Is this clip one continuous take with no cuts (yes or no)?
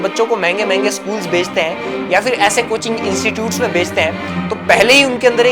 yes